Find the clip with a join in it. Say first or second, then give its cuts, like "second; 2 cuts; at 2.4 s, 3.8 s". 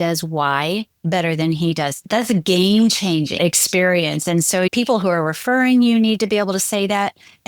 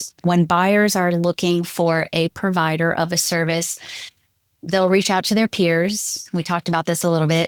first; 2 cuts; at 3.3 s, 4.7 s